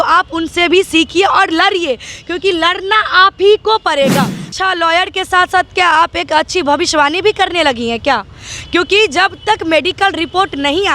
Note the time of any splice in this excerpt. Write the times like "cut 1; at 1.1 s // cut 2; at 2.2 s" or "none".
cut 1; at 4.5 s